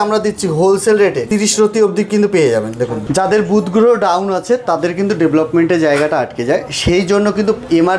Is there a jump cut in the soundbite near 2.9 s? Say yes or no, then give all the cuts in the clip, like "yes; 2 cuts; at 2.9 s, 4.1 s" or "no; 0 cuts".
yes; 2 cuts; at 1.2 s, 2.9 s